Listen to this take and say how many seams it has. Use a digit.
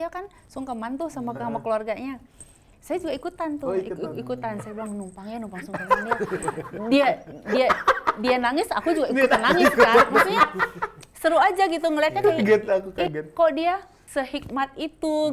1